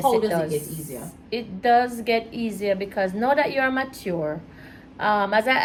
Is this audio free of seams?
yes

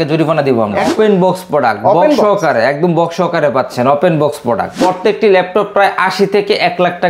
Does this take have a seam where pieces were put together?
yes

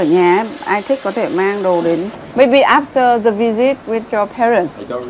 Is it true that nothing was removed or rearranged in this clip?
no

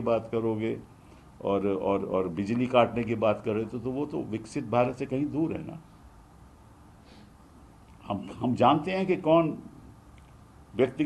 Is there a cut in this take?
no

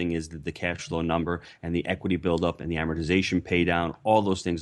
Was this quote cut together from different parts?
no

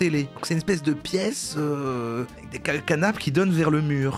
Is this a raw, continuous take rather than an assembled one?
yes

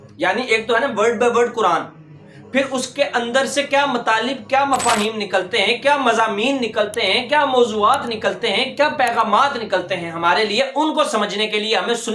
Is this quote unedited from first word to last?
yes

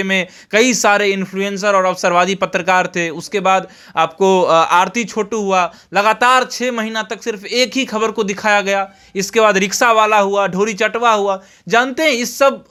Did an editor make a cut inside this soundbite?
no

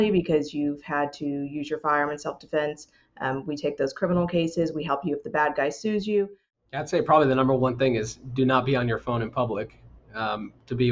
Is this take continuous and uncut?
no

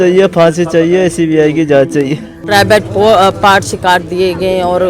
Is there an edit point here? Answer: yes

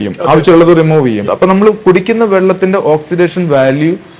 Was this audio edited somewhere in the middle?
yes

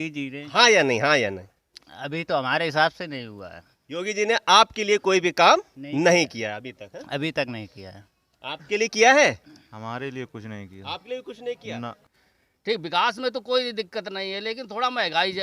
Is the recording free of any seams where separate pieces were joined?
no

